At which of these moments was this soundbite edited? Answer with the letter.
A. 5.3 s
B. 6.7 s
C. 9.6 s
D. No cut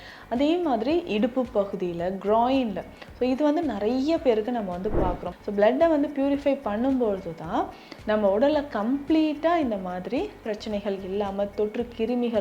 A